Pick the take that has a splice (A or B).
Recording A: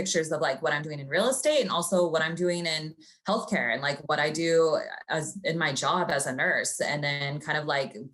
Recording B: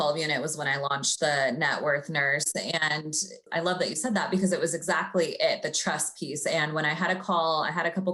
B